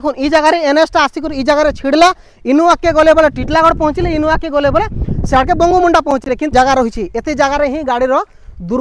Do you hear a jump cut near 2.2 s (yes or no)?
no